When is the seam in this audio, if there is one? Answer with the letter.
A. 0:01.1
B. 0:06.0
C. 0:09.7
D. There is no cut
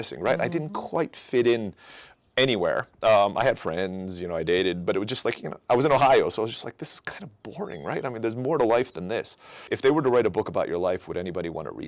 C